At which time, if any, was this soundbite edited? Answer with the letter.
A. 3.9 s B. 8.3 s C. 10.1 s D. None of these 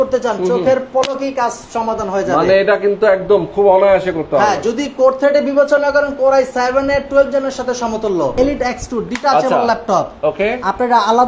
B